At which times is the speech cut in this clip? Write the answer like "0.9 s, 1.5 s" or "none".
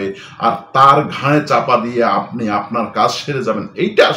none